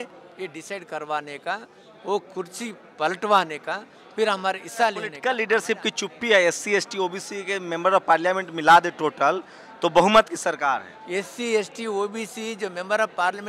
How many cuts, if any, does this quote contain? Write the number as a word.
one